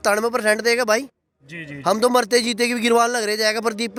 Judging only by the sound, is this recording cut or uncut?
uncut